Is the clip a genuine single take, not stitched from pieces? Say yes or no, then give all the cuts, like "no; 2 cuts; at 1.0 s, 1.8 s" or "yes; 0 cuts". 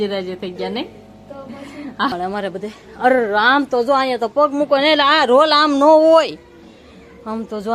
no; 1 cut; at 2.1 s